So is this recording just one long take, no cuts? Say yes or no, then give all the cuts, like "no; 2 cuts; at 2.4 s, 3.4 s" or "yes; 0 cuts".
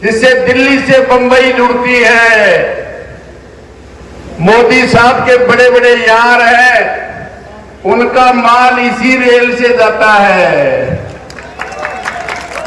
yes; 0 cuts